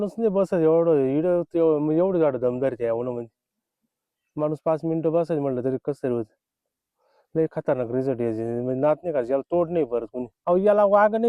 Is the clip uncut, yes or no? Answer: no